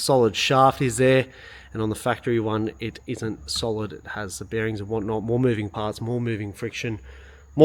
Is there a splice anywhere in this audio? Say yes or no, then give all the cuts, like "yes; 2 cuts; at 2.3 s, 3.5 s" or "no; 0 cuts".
no; 0 cuts